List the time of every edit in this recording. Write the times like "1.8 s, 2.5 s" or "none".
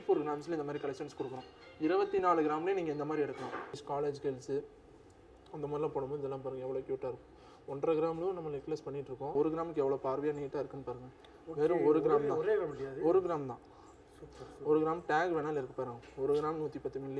3.8 s, 9.3 s